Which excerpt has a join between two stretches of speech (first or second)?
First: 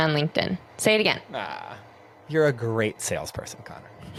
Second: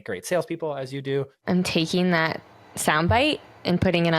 second